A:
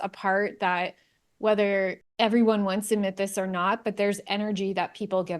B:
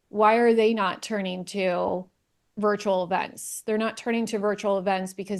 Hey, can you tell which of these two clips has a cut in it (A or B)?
A